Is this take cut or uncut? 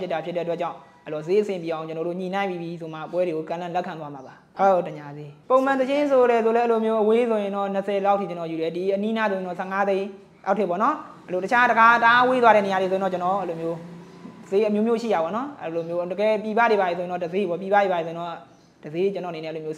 uncut